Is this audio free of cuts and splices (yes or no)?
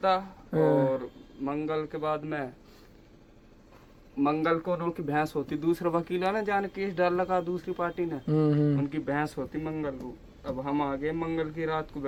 yes